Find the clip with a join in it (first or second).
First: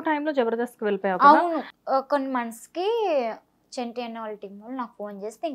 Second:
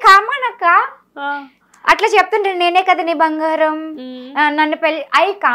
first